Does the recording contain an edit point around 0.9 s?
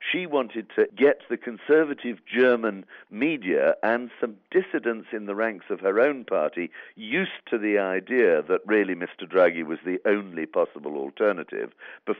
yes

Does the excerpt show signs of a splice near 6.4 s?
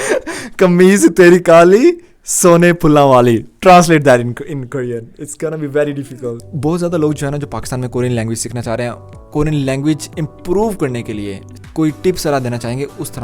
yes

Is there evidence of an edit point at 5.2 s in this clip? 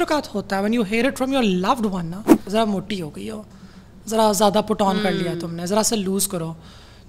no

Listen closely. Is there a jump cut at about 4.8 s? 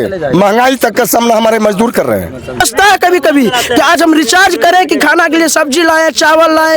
no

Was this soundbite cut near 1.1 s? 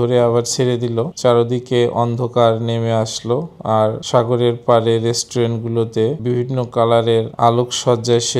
yes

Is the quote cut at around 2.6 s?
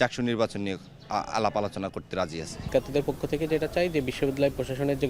yes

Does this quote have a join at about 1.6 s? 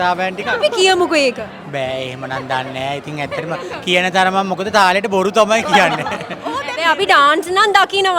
no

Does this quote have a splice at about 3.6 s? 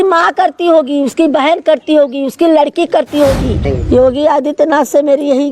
yes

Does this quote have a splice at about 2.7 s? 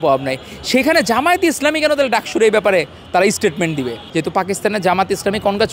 no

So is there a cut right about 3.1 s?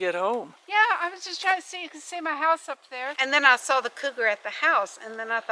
yes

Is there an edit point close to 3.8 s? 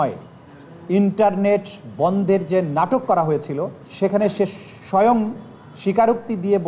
yes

